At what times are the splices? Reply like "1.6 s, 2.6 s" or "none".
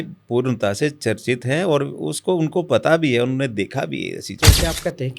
4.3 s